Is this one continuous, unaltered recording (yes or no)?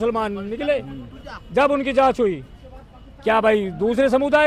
yes